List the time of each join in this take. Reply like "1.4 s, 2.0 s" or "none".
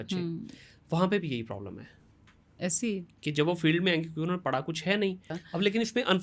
5.3 s